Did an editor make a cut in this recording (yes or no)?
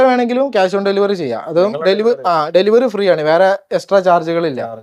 no